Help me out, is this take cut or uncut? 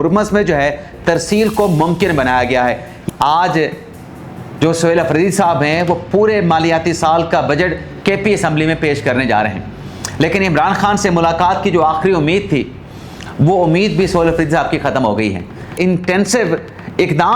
cut